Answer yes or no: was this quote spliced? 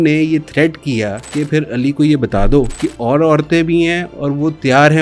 yes